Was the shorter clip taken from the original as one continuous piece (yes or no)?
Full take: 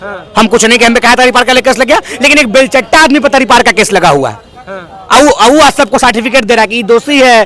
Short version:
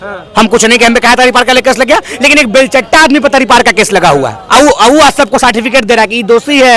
no